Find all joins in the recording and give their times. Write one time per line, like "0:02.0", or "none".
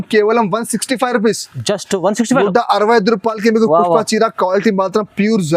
none